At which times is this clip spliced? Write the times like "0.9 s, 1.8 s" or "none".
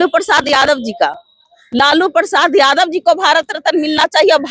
none